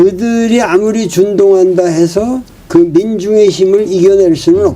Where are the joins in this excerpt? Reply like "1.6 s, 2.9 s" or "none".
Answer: 2.5 s